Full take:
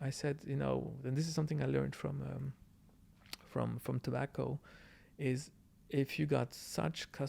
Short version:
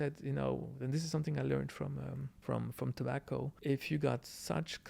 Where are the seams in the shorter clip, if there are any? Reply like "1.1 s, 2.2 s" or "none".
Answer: 2.3 s, 3.5 s